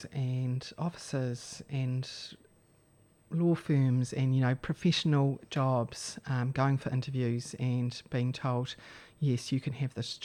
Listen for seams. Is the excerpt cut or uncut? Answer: uncut